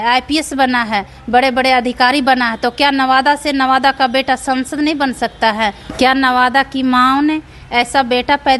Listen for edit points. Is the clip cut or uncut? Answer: cut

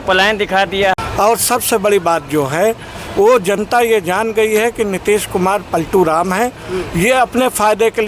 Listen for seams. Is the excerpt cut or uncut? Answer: cut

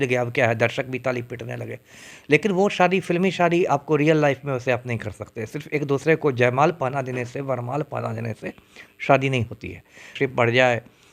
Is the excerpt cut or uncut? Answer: cut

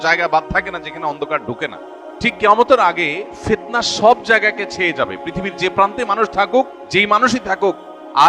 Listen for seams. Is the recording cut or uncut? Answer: cut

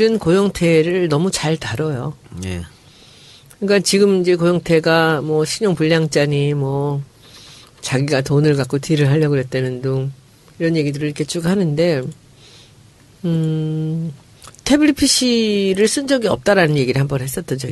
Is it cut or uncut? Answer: cut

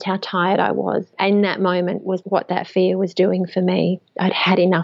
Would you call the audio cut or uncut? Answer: cut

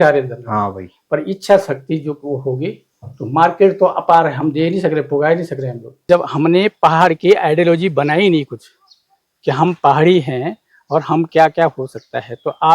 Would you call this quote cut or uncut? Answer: cut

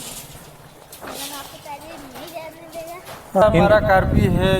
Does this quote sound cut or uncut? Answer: cut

